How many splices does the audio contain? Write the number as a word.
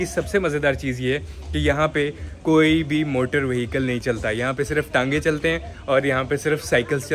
zero